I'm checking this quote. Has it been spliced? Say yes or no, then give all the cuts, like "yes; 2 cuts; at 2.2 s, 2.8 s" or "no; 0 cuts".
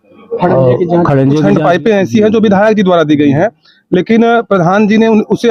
yes; 1 cut; at 1.4 s